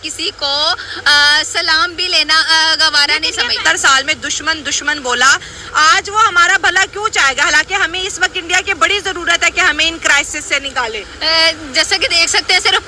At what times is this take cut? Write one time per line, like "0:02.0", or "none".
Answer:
none